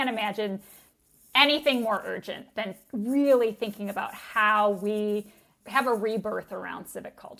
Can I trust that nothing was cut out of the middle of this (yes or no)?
yes